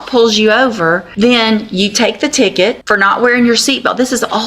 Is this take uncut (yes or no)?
no